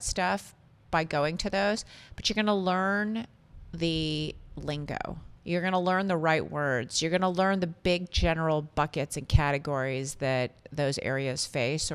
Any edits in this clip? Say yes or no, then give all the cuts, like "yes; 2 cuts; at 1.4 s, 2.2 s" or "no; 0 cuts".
no; 0 cuts